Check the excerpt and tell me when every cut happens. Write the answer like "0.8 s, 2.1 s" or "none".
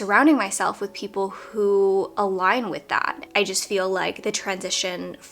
3.2 s